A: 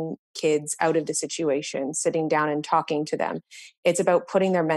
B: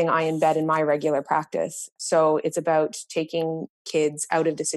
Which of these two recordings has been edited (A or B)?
B